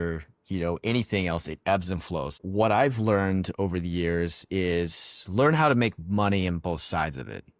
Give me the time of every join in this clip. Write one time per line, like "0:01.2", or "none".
0:02.4